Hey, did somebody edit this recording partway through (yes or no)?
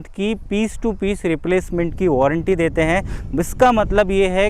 no